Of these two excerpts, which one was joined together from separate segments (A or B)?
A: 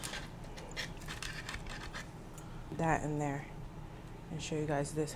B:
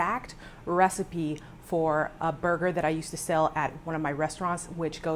A